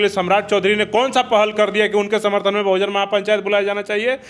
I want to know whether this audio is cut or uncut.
uncut